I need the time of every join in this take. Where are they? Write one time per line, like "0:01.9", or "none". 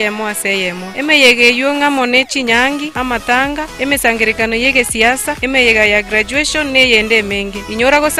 none